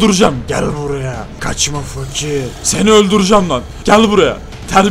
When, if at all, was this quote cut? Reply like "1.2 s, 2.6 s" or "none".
1.3 s, 2.6 s, 3.7 s